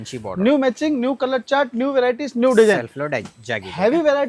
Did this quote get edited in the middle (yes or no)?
no